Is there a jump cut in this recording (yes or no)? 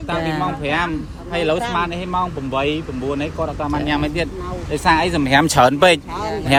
no